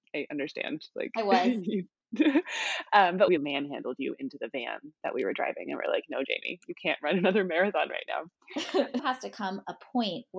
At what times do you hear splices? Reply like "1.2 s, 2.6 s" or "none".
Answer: 9.0 s